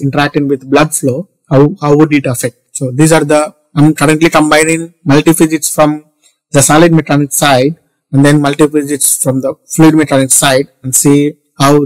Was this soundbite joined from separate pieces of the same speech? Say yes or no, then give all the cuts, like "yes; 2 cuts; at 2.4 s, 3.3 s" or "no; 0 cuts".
no; 0 cuts